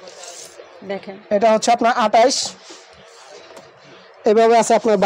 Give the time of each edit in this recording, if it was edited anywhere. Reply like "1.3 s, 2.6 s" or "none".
none